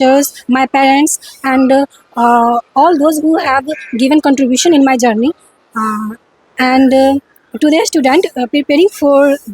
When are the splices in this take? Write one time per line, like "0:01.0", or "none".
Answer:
none